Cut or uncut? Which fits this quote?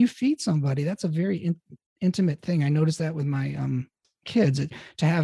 uncut